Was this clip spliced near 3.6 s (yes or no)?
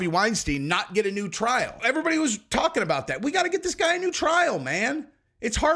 no